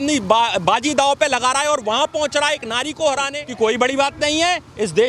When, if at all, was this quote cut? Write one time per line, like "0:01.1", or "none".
0:03.5